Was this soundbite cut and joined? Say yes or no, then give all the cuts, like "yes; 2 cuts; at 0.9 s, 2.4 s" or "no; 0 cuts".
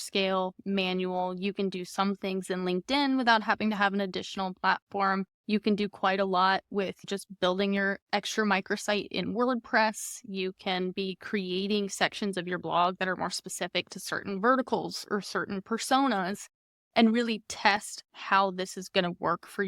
yes; 2 cuts; at 5.4 s, 7.1 s